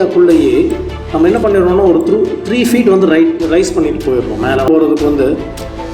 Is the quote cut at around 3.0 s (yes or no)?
no